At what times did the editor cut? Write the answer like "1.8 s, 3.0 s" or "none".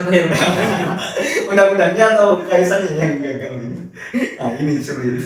none